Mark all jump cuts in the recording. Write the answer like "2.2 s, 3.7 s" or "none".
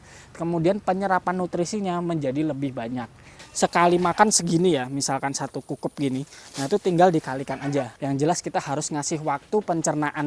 3.3 s, 7.9 s